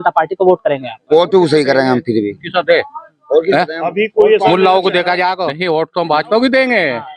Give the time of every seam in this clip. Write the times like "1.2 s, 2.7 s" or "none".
5.5 s